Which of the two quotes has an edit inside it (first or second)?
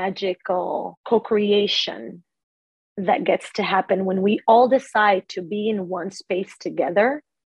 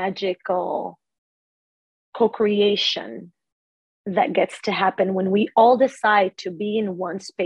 first